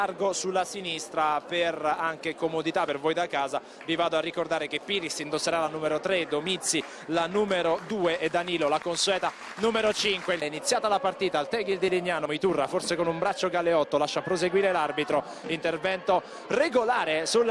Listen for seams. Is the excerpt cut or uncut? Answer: cut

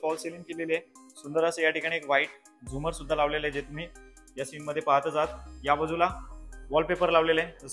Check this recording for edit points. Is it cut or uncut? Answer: uncut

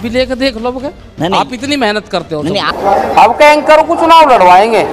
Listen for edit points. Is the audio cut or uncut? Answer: cut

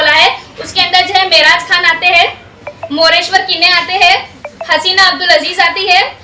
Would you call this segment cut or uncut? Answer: uncut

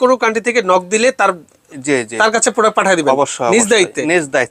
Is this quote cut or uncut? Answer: uncut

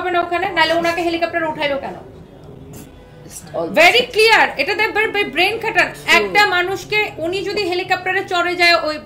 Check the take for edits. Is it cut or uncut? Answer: uncut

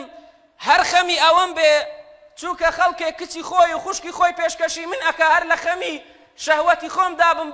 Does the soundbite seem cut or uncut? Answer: uncut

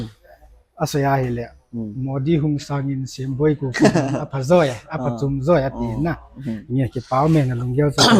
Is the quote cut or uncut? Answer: uncut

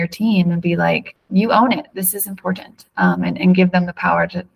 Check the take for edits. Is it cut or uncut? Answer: cut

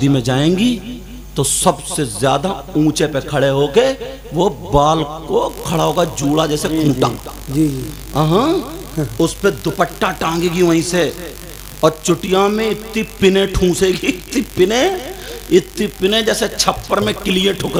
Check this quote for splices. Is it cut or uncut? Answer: uncut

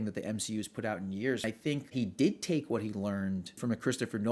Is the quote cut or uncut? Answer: cut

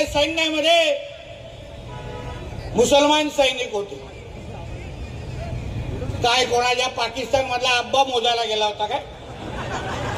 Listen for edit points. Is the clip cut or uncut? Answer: uncut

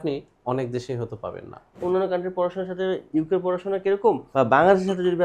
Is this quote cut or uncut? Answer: cut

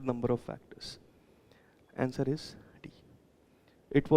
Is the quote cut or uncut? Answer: uncut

